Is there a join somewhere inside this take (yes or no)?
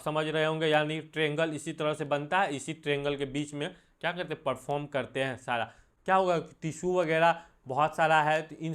yes